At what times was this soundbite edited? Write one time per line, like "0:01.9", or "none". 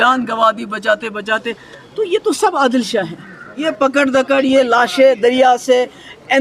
0:03.7